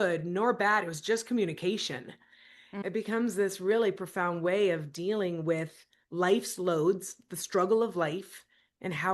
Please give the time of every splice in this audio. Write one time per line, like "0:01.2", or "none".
0:02.7